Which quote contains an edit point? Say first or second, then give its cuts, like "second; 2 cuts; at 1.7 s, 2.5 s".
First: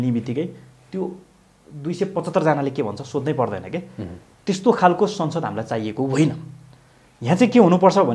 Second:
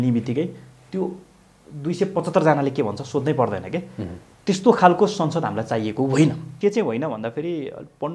second; 1 cut; at 6.5 s